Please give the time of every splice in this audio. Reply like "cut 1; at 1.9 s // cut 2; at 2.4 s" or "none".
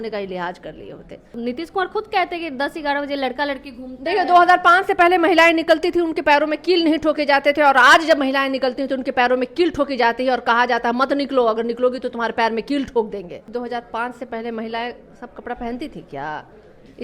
cut 1; at 1.4 s // cut 2; at 13.5 s